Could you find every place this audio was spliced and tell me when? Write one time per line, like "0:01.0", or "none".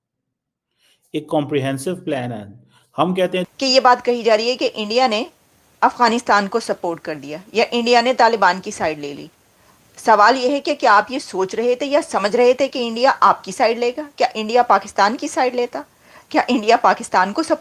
0:03.4